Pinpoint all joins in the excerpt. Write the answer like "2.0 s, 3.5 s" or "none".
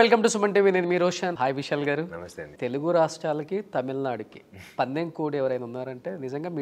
1.3 s